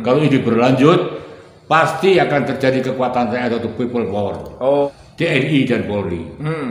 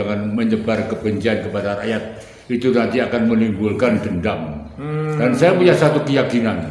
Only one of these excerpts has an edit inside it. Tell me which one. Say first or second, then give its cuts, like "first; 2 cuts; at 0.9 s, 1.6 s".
first; 1 cut; at 4.9 s